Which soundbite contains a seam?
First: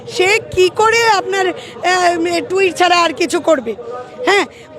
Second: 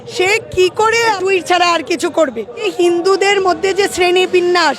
second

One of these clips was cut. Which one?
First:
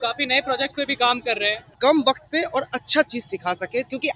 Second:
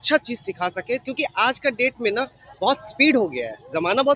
first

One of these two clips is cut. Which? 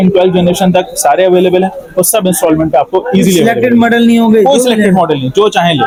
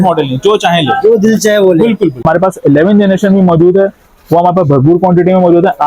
second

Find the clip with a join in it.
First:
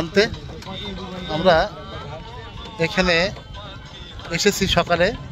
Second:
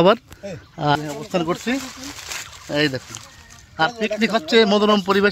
first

